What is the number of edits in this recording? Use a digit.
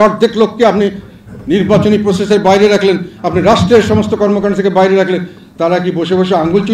0